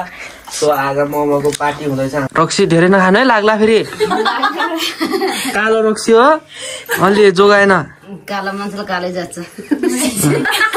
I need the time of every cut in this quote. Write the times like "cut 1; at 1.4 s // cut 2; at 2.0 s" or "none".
cut 1; at 2.3 s